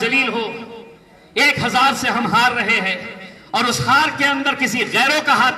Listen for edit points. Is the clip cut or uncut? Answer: uncut